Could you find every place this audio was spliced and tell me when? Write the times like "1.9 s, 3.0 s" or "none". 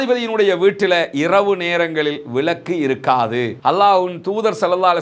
3.5 s